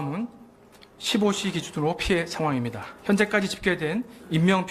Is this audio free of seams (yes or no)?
yes